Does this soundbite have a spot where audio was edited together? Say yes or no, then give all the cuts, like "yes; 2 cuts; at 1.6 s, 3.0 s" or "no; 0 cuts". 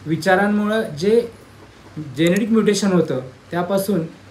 no; 0 cuts